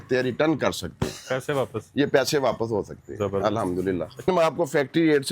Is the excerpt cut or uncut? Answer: cut